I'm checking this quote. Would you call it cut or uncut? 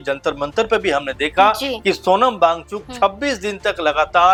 uncut